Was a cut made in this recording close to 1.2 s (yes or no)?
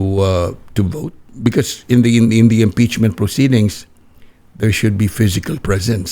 yes